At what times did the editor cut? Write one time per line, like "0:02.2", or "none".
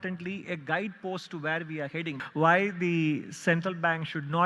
0:02.2